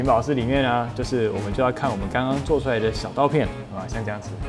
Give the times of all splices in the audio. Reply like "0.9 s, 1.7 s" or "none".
3.5 s